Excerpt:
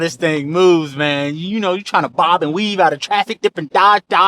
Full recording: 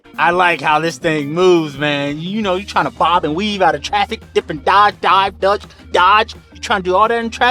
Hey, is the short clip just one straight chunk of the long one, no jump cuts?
no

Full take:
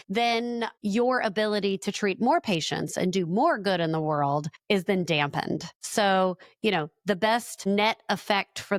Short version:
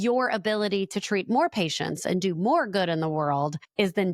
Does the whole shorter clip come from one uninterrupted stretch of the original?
yes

